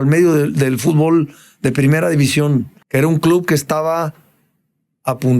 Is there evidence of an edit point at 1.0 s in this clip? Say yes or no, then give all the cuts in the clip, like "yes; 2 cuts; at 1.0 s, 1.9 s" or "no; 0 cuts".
no; 1 cut; at 2.8 s